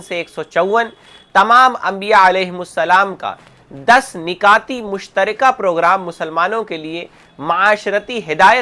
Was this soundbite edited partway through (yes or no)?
no